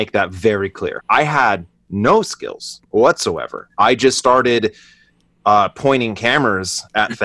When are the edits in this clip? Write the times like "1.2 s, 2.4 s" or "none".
1.0 s